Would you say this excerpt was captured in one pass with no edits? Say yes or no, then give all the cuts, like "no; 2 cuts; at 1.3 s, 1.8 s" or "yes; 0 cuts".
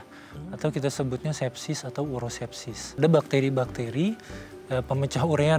no; 1 cut; at 2.8 s